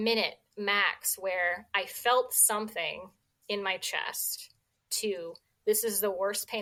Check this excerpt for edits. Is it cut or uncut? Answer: uncut